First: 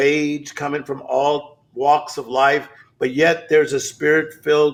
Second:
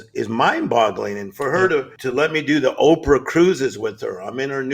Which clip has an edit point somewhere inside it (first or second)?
second